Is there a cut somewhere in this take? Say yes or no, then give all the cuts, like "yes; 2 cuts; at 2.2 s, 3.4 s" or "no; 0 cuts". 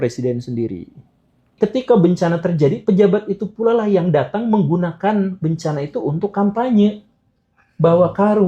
yes; 1 cut; at 1.5 s